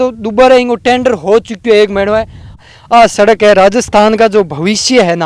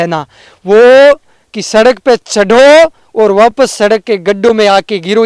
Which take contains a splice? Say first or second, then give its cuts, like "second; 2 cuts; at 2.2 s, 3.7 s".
first; 1 cut; at 2.6 s